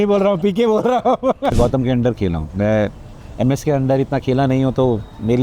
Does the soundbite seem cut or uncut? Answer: cut